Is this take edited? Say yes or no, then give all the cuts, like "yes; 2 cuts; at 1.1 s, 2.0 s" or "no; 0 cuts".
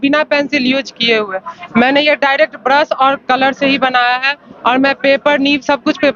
no; 0 cuts